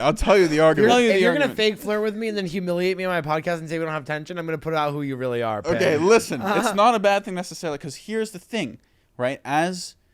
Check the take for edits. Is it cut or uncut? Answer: cut